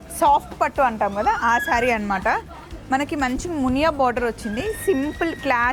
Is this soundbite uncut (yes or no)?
yes